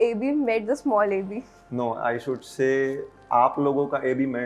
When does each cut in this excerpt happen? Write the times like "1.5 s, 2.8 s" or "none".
none

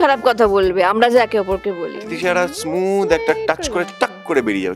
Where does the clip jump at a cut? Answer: 1.9 s

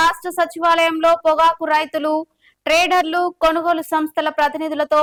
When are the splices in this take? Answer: none

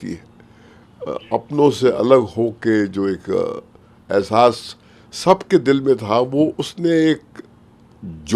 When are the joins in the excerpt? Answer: none

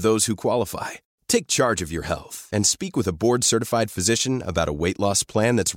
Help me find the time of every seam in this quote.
none

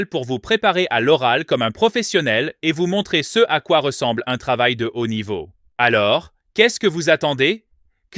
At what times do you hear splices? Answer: 5.6 s

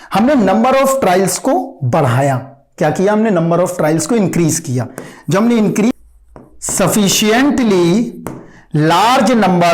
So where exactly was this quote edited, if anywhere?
5.9 s

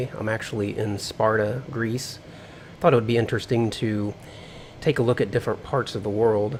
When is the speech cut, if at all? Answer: none

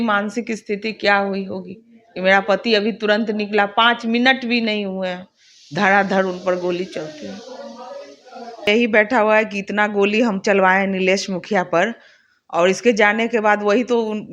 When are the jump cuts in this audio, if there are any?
8.7 s

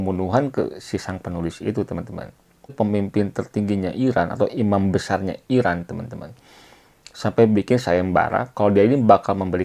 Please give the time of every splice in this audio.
2.7 s

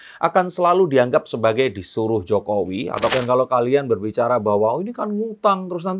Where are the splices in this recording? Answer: 3.1 s

